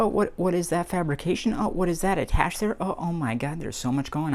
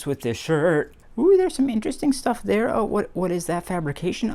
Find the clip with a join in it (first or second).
second